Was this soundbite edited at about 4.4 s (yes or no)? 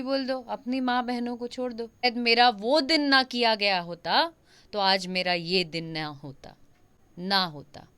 no